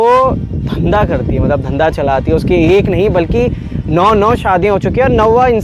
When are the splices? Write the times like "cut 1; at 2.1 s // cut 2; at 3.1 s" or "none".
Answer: none